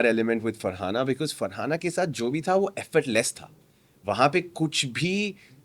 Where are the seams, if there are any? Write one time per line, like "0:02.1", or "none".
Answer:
none